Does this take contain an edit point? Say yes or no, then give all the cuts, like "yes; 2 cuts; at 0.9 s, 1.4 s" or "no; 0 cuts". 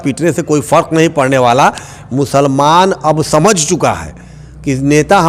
no; 0 cuts